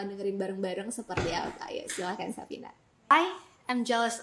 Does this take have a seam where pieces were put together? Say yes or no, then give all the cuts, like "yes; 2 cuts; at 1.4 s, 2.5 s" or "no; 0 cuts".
yes; 1 cut; at 3.1 s